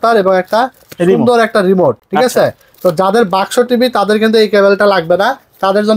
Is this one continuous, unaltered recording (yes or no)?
yes